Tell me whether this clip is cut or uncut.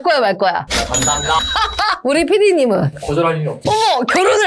uncut